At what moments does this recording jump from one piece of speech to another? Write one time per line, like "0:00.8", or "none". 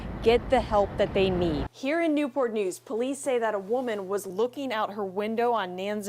0:01.8